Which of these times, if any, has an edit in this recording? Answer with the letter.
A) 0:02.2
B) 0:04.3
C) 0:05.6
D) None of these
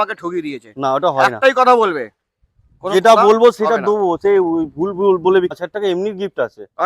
C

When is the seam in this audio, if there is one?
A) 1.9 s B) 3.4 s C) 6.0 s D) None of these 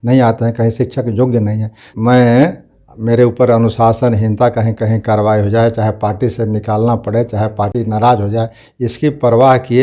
A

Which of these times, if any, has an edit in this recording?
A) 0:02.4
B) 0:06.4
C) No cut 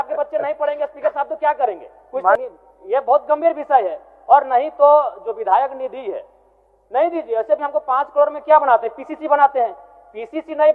A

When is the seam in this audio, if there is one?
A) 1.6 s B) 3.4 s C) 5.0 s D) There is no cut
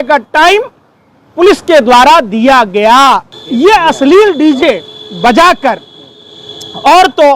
B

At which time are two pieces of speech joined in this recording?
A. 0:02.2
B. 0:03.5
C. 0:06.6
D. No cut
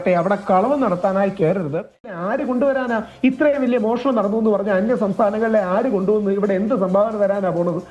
A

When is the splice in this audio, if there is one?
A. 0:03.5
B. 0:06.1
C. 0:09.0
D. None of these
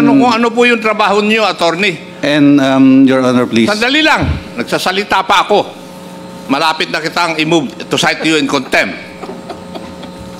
D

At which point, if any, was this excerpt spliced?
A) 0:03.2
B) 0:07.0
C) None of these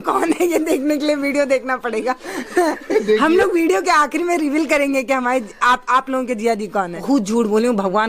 B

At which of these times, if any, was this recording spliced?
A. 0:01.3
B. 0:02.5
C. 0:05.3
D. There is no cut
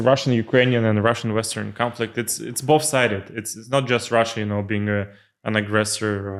D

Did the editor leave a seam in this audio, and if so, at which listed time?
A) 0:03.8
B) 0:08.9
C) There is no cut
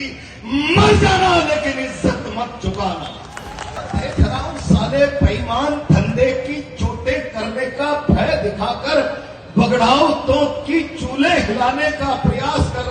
A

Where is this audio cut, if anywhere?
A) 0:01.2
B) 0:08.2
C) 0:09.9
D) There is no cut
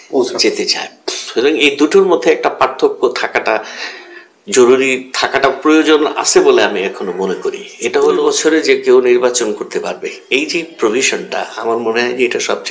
B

